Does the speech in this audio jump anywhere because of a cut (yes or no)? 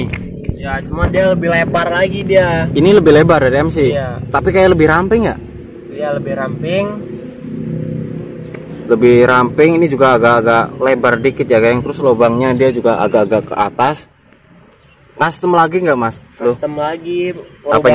no